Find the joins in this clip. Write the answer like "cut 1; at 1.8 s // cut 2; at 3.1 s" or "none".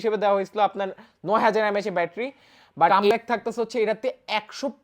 cut 1; at 3.0 s